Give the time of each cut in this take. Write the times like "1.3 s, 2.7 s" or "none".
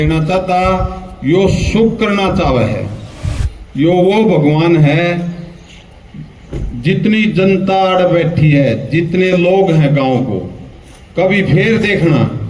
none

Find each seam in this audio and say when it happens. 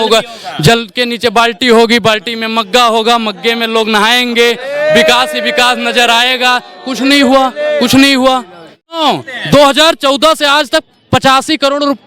9.0 s

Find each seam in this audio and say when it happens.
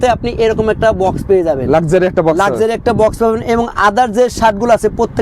none

